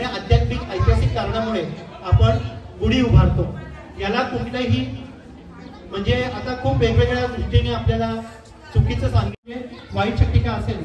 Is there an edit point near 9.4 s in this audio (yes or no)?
yes